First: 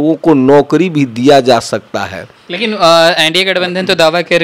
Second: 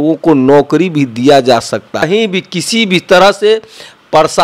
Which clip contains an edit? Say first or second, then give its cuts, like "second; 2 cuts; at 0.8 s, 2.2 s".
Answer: second; 1 cut; at 2.0 s